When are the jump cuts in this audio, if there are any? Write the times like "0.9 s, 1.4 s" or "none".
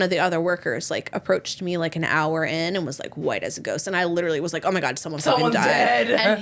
none